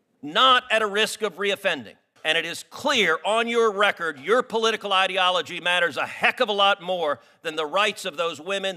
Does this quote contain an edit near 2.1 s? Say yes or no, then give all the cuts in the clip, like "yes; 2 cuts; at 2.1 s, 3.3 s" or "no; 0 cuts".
yes; 1 cut; at 2.1 s